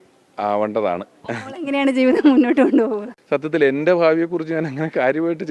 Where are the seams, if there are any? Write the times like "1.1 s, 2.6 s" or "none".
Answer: none